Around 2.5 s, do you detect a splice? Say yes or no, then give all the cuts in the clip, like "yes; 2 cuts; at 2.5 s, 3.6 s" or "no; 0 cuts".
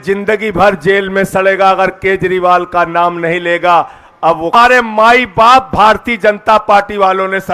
no; 1 cut; at 4.5 s